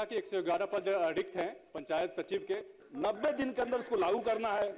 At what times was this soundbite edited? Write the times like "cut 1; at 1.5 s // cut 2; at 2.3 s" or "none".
cut 1; at 2.8 s